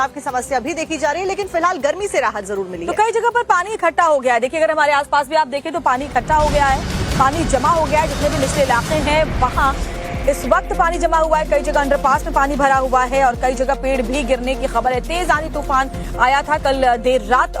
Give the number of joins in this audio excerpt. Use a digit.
1